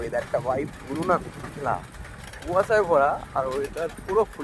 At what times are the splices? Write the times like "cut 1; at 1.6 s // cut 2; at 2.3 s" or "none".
none